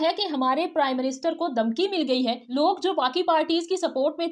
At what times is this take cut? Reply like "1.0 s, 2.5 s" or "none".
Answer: 2.4 s